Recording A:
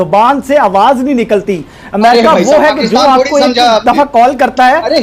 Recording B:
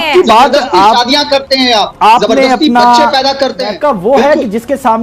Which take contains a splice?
B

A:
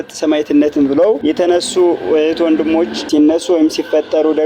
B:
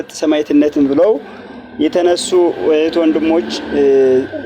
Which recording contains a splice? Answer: A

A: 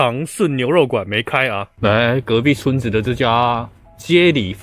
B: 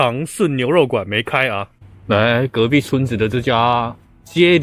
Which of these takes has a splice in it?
A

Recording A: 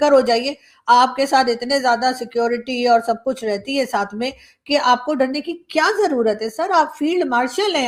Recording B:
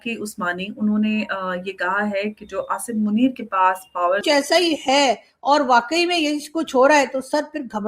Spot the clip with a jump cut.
B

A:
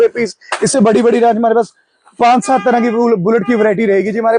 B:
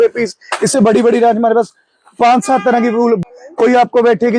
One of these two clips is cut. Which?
B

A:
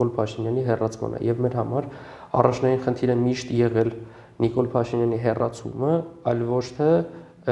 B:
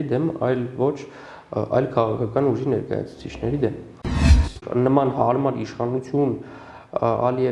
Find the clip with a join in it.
B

